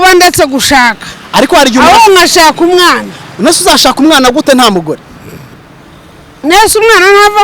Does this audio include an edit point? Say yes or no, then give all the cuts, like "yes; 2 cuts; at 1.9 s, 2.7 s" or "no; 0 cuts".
no; 0 cuts